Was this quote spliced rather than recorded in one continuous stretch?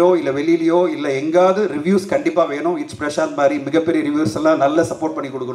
no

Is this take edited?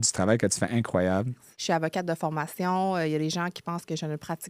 yes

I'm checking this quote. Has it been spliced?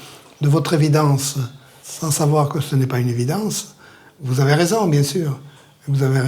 yes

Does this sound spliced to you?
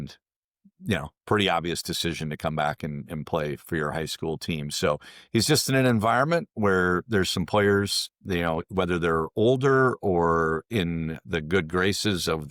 no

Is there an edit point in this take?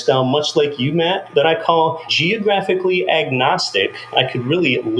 yes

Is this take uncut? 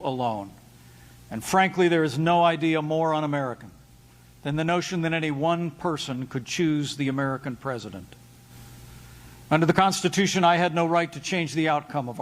no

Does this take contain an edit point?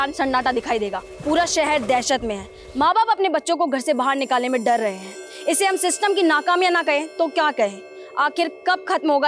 yes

